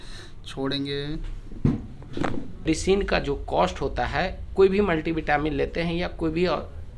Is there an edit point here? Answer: yes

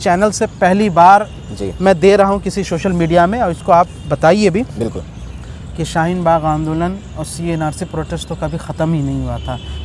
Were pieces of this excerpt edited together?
no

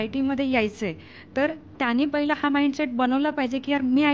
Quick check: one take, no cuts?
yes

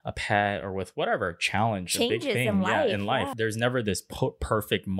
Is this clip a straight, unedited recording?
no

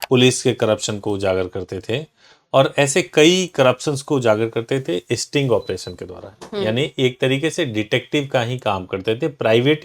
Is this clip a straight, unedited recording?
yes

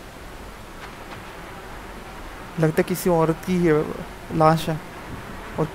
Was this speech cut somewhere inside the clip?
yes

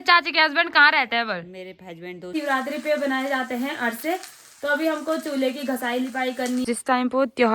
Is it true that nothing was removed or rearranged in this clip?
no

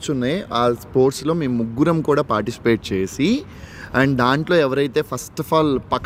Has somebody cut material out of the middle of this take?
no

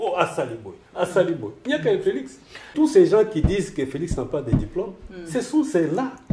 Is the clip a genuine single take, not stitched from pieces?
no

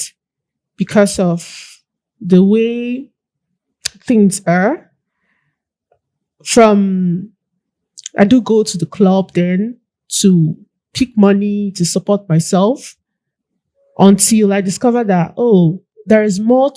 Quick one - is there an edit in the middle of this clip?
yes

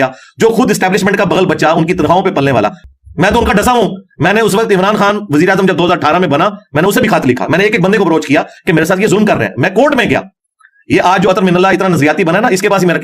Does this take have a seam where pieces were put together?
yes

